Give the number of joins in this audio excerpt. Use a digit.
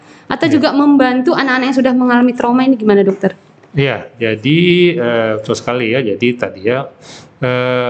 0